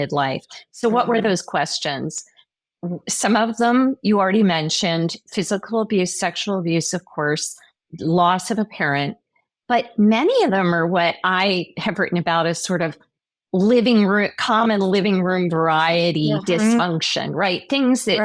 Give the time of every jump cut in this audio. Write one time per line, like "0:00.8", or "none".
none